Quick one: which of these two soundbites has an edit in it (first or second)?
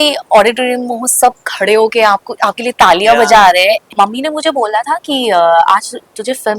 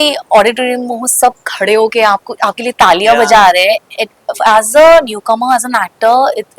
first